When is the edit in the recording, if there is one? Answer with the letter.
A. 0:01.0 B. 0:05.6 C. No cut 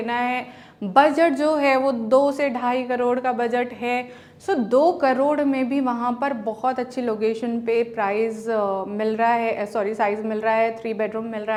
C